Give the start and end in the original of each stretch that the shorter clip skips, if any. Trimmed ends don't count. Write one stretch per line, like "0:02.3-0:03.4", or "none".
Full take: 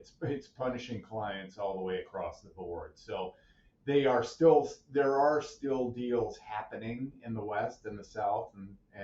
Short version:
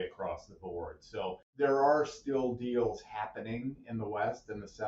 0:03.4-0:04.8